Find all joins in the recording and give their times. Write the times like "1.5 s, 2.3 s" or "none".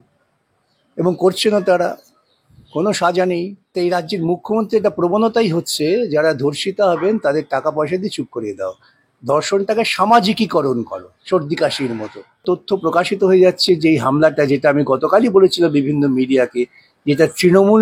3.7 s, 12.4 s